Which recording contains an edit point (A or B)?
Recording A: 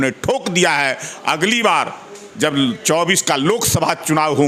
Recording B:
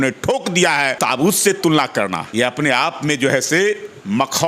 B